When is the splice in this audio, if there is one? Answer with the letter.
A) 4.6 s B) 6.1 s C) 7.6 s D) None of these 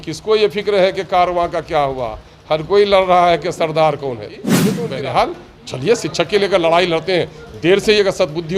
A